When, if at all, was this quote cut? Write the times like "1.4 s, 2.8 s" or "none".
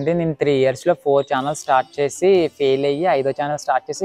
none